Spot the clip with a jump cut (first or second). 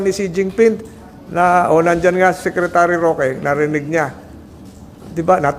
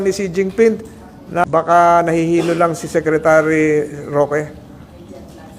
second